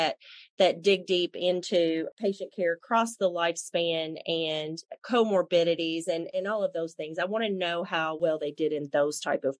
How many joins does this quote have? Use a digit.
3